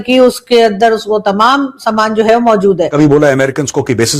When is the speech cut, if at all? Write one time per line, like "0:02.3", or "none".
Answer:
0:02.9